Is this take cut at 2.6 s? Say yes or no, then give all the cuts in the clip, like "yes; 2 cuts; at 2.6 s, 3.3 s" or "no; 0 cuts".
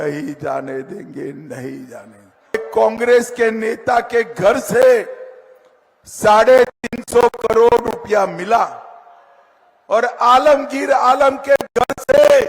yes; 1 cut; at 2.6 s